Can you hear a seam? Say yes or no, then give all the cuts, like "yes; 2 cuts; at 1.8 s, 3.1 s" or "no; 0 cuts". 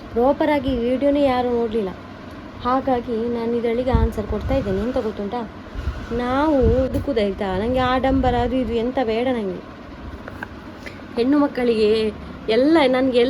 yes; 1 cut; at 6.9 s